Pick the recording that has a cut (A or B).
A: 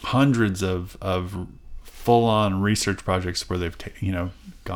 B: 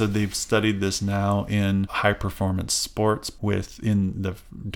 B